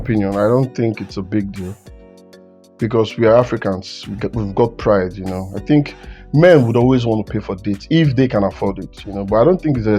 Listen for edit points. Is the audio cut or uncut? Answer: uncut